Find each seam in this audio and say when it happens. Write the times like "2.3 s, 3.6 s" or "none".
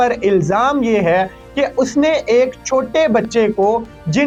none